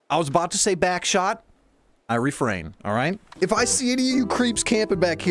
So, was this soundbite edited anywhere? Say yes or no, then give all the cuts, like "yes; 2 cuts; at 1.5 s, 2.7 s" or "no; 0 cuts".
yes; 1 cut; at 3.2 s